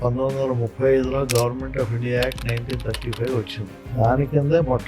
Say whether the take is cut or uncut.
cut